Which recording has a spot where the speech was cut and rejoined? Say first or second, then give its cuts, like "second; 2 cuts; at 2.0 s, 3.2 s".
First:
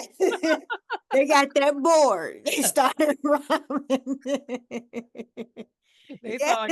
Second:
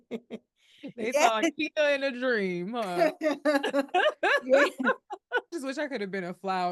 second; 1 cut; at 5.5 s